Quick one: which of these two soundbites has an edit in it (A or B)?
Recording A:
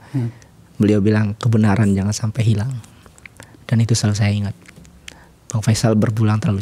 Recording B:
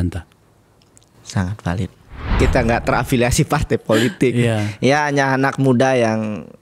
B